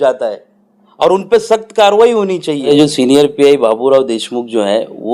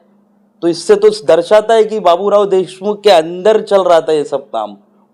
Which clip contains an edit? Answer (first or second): first